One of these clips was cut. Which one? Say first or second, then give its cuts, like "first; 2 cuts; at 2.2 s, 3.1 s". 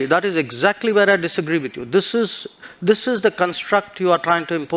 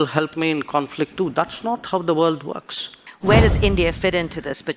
second; 1 cut; at 3.1 s